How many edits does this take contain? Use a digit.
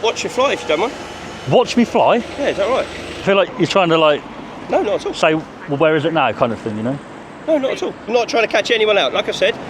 2